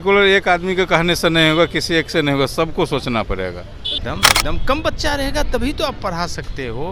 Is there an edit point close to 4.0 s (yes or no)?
yes